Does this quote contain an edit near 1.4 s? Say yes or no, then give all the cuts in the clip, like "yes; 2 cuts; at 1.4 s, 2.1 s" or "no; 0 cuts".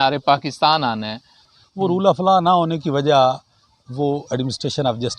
yes; 1 cut; at 1.4 s